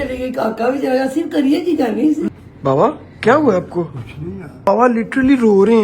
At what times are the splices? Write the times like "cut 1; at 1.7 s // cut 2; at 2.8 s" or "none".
cut 1; at 2.3 s // cut 2; at 4.7 s